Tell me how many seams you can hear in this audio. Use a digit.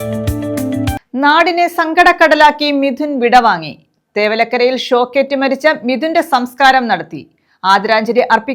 1